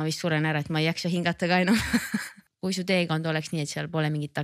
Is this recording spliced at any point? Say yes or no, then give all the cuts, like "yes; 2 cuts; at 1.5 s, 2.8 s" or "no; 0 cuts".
yes; 1 cut; at 2.5 s